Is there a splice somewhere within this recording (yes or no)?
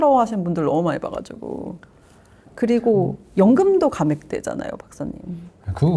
no